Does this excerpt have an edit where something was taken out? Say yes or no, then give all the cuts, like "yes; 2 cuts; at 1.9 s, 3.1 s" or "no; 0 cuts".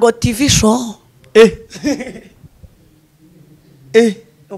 no; 0 cuts